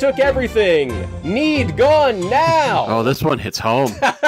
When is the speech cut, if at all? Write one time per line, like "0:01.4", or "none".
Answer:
0:02.9